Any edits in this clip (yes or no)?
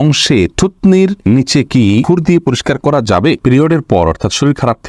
yes